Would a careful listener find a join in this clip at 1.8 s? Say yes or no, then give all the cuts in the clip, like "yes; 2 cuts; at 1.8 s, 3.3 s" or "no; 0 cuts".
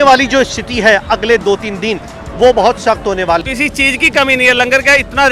no; 1 cut; at 3.4 s